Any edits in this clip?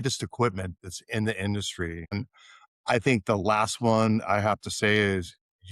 yes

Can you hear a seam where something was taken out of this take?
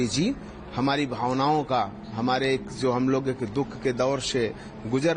no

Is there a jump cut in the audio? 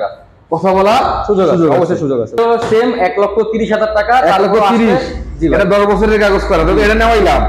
yes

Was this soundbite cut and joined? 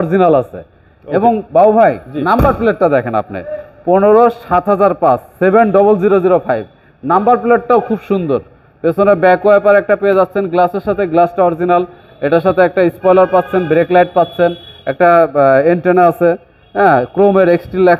no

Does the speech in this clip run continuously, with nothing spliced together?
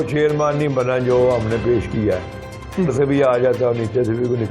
no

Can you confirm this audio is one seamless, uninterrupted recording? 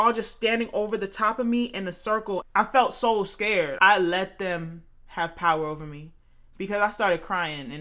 no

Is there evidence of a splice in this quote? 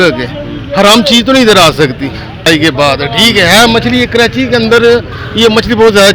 yes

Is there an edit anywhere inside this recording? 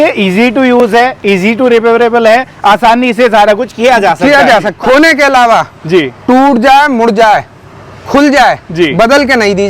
yes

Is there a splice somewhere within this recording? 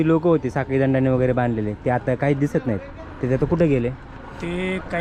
no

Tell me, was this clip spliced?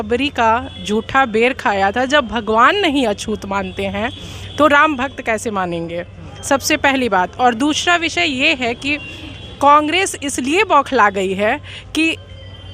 no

